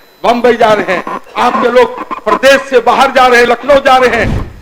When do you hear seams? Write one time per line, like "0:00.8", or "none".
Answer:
none